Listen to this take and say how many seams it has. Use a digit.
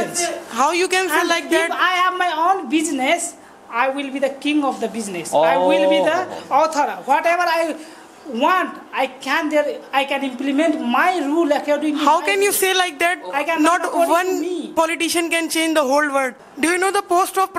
1